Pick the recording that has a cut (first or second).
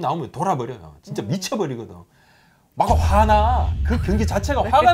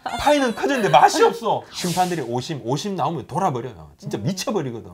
second